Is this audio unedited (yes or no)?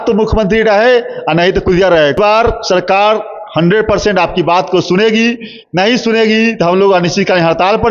yes